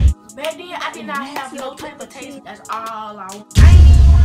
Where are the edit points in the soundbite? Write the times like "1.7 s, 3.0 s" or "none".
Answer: 2.4 s, 3.5 s